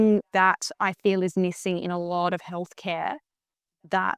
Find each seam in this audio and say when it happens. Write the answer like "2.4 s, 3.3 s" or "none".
none